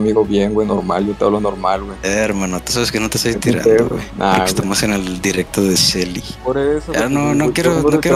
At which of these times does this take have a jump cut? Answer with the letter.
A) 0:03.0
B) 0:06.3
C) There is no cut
B